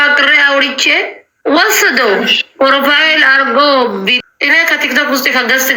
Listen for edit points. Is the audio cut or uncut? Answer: cut